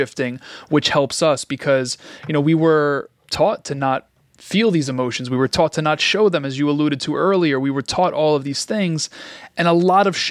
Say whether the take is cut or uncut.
cut